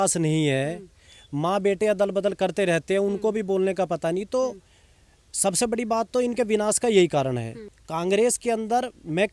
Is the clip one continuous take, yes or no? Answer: no